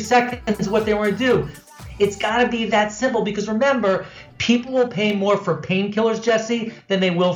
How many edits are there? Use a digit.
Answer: 1